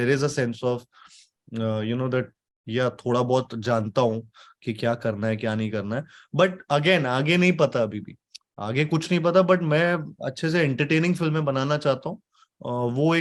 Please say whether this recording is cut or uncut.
uncut